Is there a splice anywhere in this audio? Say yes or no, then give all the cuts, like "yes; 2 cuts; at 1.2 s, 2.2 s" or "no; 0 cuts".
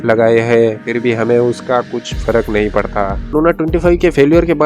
yes; 1 cut; at 3.3 s